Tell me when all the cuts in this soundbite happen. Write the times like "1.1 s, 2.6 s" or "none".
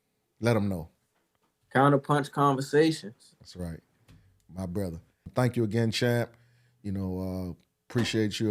5.3 s